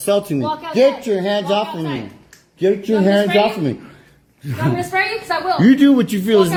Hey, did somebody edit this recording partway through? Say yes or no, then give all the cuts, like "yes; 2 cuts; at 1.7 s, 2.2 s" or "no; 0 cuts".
no; 0 cuts